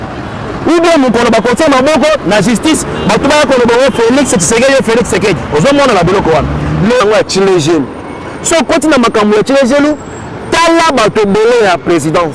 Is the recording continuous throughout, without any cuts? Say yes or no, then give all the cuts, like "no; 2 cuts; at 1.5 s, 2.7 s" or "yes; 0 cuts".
no; 1 cut; at 7.0 s